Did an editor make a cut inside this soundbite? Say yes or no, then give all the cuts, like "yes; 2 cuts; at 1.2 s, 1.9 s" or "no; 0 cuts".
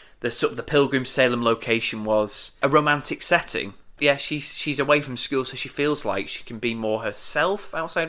yes; 2 cuts; at 2.5 s, 4.0 s